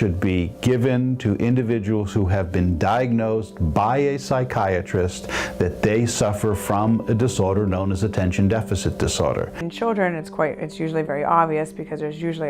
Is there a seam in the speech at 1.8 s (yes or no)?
yes